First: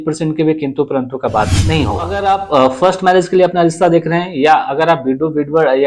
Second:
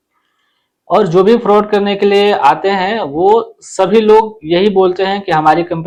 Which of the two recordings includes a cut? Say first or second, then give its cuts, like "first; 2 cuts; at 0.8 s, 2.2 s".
first; 1 cut; at 2.1 s